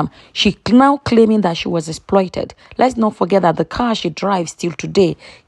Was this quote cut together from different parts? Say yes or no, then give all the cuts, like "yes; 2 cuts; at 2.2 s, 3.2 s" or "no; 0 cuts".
no; 0 cuts